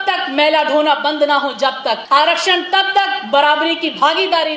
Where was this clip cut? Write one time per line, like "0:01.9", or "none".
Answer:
none